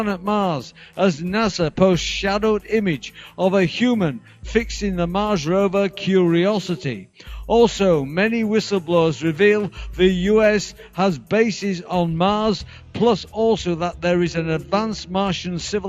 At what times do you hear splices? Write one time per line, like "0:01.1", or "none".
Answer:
0:05.9